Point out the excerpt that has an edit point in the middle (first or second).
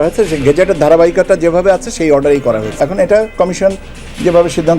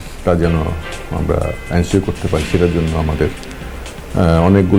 first